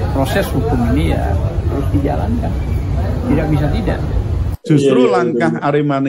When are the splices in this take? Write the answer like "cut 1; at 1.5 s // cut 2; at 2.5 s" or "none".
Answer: cut 1; at 4.4 s